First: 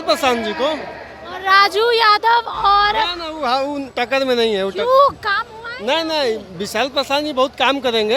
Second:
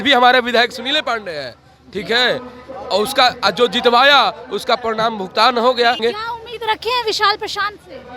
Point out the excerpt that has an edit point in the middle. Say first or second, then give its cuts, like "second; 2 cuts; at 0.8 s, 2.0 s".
second; 1 cut; at 6.0 s